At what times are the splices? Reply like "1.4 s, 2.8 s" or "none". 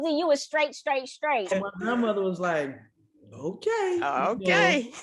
1.5 s